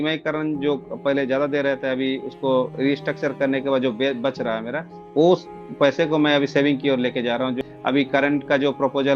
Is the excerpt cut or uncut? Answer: cut